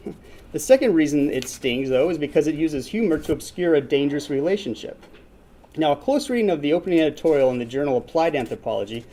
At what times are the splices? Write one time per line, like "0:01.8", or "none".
none